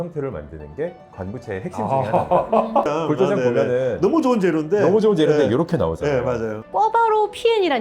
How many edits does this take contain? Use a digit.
2